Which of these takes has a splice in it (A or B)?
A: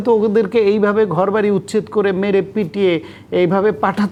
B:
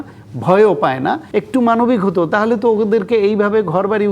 B